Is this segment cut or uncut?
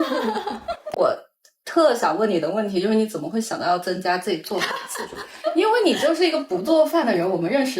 cut